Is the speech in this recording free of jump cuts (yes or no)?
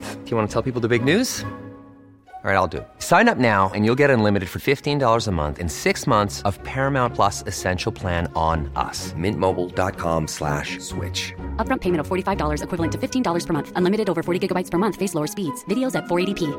yes